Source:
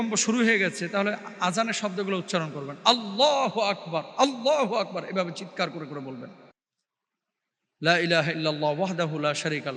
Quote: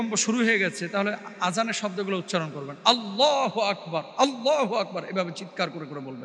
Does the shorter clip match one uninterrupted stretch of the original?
yes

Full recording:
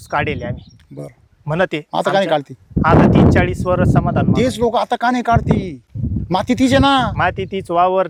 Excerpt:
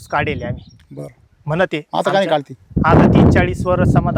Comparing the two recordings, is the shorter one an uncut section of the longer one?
yes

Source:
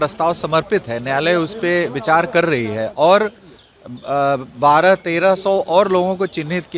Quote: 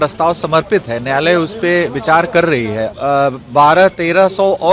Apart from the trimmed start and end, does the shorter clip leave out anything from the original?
yes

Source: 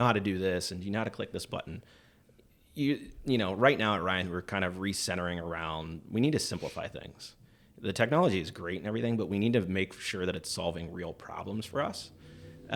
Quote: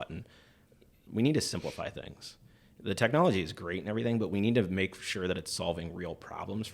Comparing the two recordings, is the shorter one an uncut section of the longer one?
no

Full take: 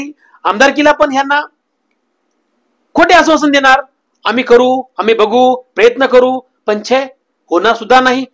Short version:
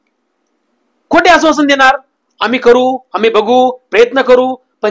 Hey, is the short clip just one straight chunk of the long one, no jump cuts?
yes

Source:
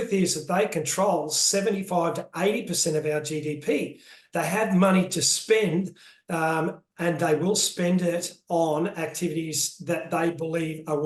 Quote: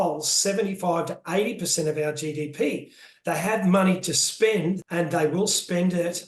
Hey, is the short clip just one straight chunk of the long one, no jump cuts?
no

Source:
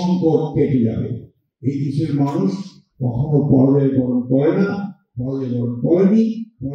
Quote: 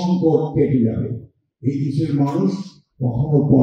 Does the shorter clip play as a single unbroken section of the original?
yes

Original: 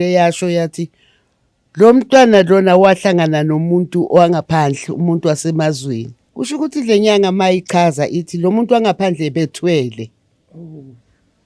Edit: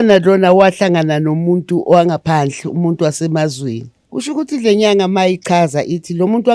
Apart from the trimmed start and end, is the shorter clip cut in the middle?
no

